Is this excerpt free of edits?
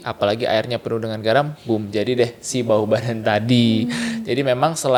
yes; 0 cuts

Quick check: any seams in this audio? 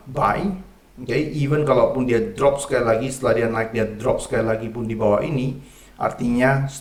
no; 0 cuts

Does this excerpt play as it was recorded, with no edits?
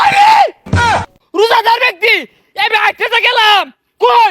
no; 1 cut; at 0.9 s

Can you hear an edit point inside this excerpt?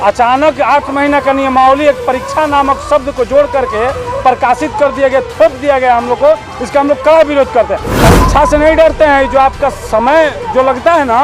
yes; 1 cut; at 8.0 s

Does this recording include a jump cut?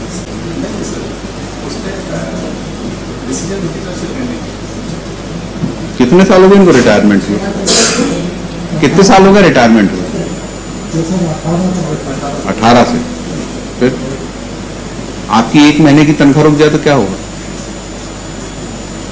no; 0 cuts

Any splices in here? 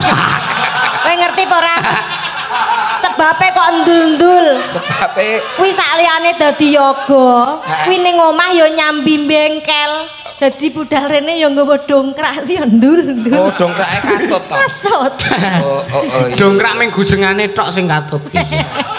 no; 0 cuts

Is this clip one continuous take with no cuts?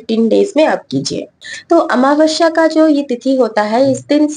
no; 1 cut; at 1.2 s

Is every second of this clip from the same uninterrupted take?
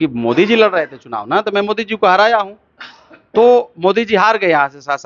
yes; 0 cuts

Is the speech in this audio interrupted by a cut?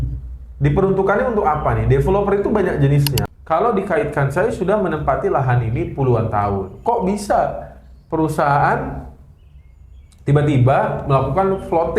yes; 1 cut; at 3.2 s

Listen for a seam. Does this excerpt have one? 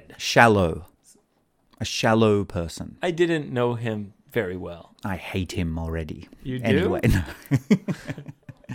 no; 0 cuts

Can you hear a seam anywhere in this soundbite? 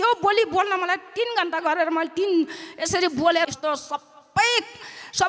yes; 1 cut; at 3.5 s

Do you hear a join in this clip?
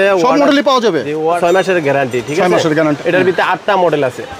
yes; 2 cuts; at 1.4 s, 3.0 s

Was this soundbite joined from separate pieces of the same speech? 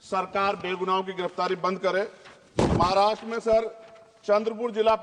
no; 0 cuts

